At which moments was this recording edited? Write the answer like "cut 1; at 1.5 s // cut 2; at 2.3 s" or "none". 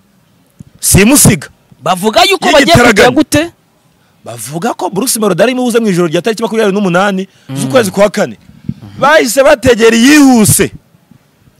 none